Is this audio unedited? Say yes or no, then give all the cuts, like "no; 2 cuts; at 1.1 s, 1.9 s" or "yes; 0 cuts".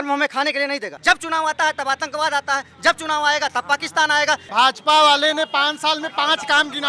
no; 2 cuts; at 0.9 s, 4.5 s